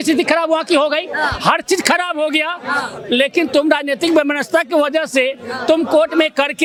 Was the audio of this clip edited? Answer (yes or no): no